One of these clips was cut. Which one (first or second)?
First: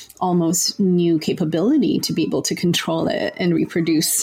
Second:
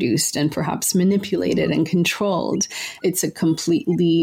second